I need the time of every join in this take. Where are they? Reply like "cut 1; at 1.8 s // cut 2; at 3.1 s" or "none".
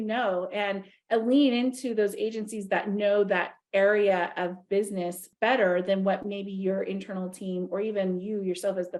none